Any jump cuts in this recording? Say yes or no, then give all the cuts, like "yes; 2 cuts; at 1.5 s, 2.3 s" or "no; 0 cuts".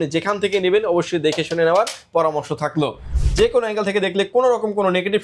yes; 1 cut; at 3.1 s